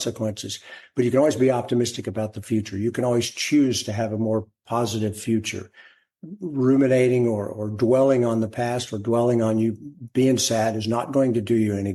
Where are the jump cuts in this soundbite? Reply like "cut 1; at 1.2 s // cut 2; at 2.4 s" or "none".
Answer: none